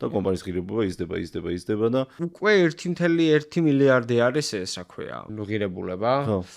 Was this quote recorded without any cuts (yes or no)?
no